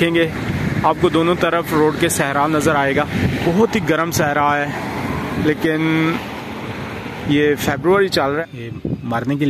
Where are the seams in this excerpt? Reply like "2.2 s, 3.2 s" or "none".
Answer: 3.4 s, 8.4 s